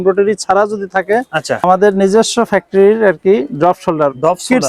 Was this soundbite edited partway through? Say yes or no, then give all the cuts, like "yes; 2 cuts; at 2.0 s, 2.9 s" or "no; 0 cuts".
yes; 1 cut; at 1.6 s